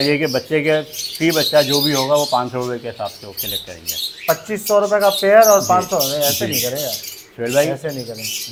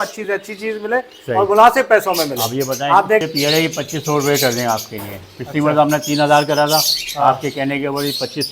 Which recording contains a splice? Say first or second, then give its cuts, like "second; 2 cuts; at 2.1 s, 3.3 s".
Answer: second; 1 cut; at 3.2 s